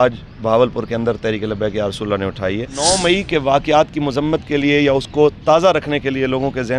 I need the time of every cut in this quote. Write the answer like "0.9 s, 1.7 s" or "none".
2.8 s